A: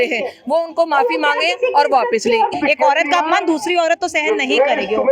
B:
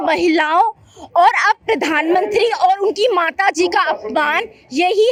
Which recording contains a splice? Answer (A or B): A